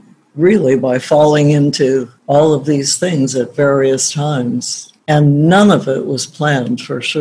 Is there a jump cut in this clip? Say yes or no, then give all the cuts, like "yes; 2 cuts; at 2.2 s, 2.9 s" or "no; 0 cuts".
no; 0 cuts